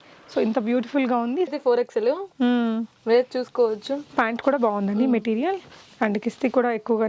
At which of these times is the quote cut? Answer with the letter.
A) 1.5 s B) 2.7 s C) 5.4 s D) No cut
A